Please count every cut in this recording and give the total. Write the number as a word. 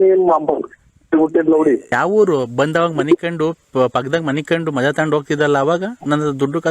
one